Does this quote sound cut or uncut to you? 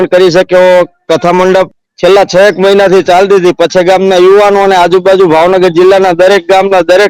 cut